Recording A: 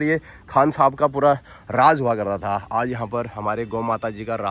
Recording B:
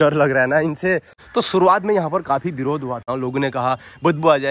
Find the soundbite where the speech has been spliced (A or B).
B